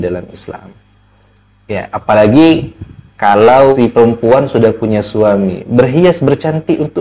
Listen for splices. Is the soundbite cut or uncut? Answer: cut